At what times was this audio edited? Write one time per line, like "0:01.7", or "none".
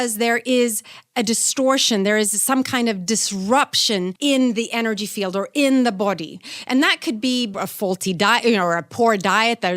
0:04.1
0:07.5